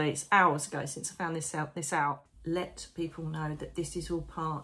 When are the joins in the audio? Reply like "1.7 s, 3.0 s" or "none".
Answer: 2.3 s